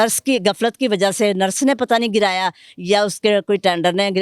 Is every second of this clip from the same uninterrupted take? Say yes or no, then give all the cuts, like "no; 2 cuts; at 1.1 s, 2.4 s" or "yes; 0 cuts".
yes; 0 cuts